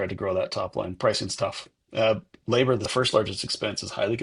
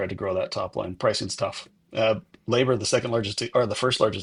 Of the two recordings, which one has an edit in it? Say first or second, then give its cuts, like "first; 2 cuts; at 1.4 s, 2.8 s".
first; 1 cut; at 2.9 s